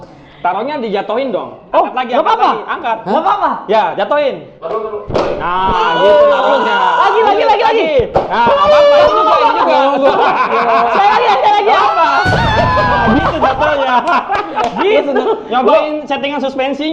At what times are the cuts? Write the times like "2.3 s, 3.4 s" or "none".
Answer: none